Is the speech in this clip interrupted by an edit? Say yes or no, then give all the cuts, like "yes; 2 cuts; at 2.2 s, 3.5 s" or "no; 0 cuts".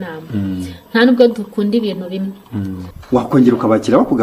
yes; 1 cut; at 2.9 s